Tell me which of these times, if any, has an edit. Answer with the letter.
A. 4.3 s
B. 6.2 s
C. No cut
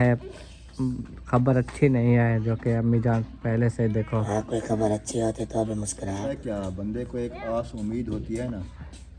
B